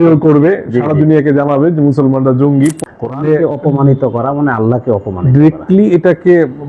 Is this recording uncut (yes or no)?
no